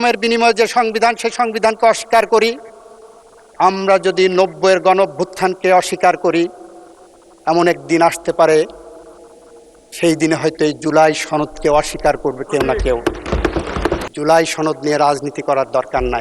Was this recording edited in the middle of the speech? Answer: yes; 1 cut; at 14.1 s

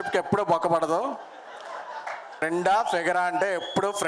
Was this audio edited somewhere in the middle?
yes; 1 cut; at 2.4 s

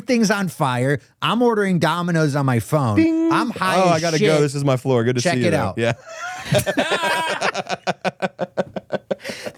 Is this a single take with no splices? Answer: yes; 0 cuts

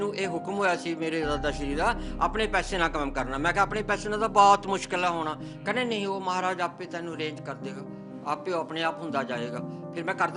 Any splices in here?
no; 0 cuts

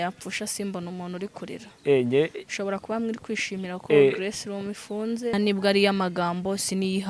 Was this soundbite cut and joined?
yes; 1 cut; at 5.3 s

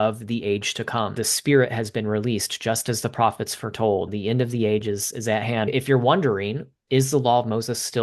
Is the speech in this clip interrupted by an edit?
yes; 4 cuts; at 1.3 s, 4.1 s, 5.7 s, 6.7 s

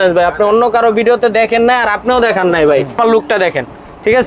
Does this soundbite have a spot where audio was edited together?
yes; 1 cut; at 3.0 s

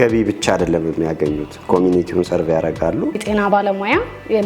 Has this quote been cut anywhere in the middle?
yes; 1 cut; at 3.2 s

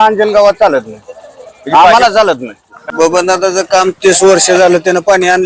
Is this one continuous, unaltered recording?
no; 1 cut; at 2.8 s

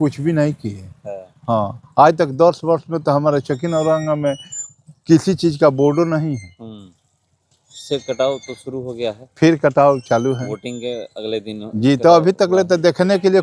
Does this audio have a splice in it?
no; 0 cuts

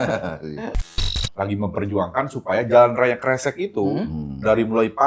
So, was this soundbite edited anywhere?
yes; 1 cut; at 1.0 s

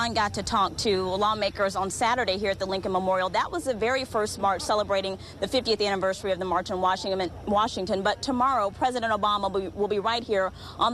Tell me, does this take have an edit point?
no; 0 cuts

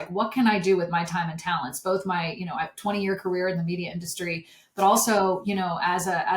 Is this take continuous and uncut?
yes; 0 cuts

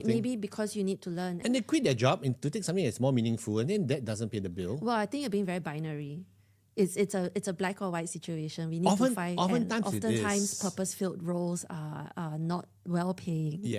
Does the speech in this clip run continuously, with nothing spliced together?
no; 1 cut; at 1.4 s

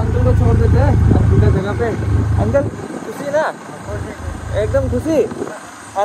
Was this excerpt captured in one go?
yes; 0 cuts

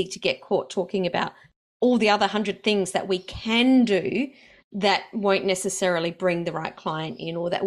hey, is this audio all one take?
yes; 0 cuts

